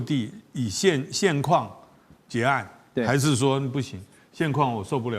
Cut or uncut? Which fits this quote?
uncut